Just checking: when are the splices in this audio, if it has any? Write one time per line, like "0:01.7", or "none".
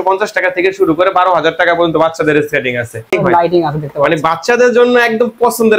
0:03.1